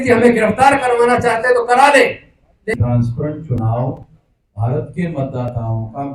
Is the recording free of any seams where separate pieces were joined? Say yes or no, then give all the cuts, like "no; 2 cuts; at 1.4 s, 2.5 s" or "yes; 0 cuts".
no; 1 cut; at 2.8 s